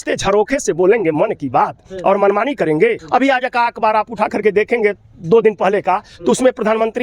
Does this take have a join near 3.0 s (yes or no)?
yes